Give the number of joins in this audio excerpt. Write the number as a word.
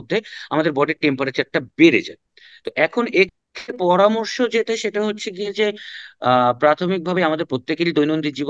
zero